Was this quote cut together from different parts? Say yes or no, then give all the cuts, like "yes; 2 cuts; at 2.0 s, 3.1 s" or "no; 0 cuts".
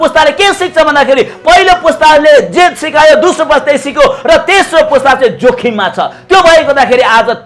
no; 0 cuts